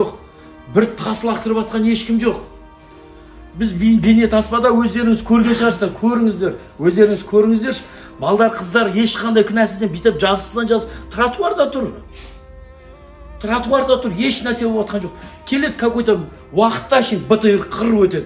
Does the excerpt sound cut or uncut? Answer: uncut